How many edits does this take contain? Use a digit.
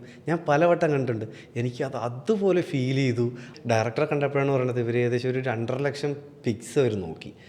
1